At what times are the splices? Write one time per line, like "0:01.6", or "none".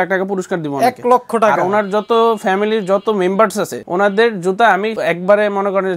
0:04.9